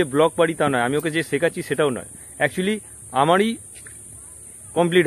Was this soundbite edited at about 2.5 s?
no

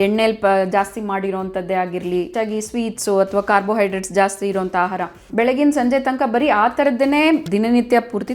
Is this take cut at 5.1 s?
yes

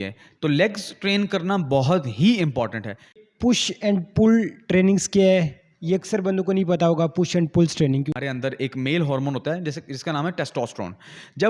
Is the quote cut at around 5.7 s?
no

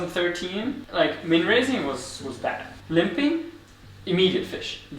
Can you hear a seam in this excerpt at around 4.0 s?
no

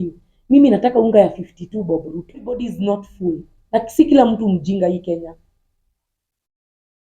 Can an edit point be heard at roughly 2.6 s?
yes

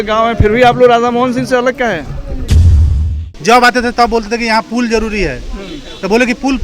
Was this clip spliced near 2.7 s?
yes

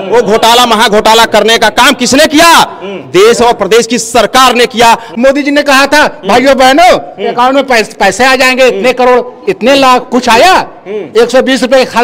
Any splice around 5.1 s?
yes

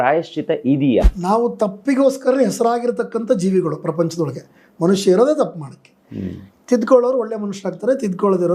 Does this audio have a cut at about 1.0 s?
yes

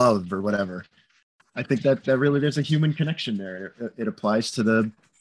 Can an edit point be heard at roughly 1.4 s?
yes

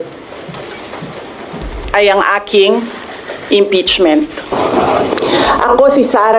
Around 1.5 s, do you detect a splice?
no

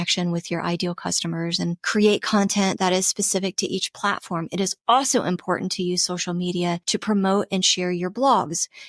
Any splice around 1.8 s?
yes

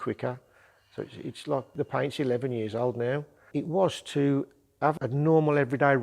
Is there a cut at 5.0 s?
yes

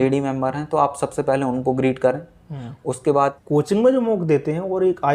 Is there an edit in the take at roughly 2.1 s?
no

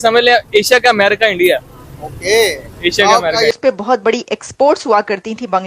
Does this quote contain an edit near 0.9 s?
no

